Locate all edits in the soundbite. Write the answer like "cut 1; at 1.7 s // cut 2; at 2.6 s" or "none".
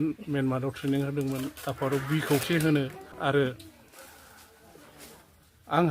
cut 1; at 3.1 s